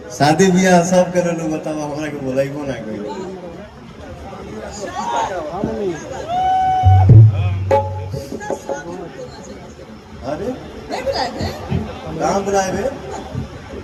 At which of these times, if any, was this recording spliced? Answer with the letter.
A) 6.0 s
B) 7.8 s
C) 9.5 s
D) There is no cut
D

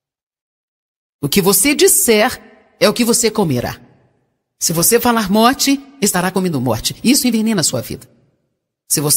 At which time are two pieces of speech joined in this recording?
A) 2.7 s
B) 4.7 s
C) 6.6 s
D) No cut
B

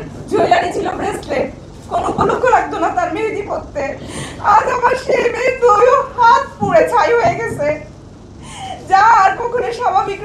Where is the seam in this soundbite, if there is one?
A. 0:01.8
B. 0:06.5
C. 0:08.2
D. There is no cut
D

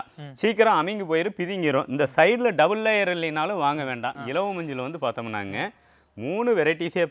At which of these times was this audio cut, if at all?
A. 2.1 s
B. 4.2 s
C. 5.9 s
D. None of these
B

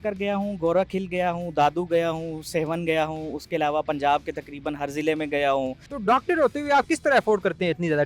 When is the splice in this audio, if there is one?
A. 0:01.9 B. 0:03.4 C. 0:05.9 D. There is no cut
C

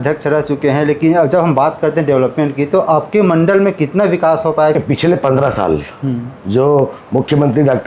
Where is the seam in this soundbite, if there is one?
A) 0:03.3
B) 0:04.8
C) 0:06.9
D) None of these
B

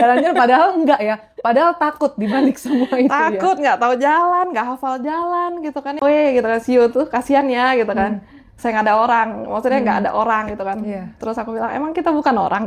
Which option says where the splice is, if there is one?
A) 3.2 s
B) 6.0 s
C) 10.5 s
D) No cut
B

